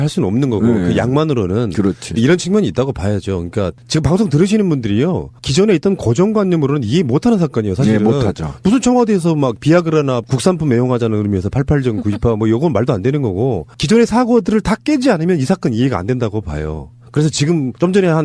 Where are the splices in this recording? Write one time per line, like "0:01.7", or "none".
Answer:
0:08.2